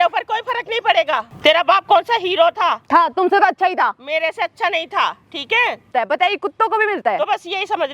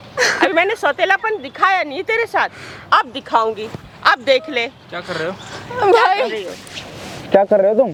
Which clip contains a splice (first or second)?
first